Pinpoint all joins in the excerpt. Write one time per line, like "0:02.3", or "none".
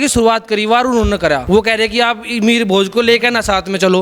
0:01.4

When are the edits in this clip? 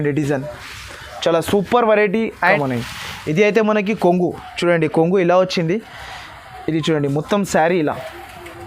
0:02.4

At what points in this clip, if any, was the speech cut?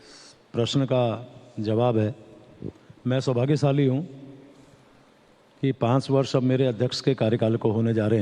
0:03.4

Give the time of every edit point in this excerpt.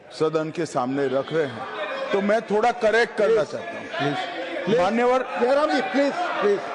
none

